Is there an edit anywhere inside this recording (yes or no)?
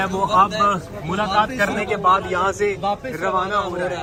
no